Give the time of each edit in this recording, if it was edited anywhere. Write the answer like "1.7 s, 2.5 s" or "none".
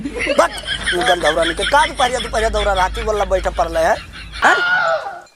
4.4 s